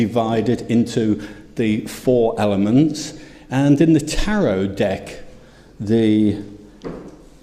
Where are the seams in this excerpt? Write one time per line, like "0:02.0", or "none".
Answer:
none